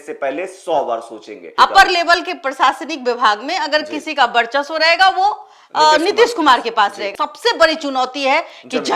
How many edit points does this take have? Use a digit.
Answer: 2